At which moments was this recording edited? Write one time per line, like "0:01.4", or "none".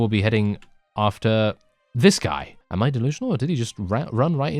0:02.6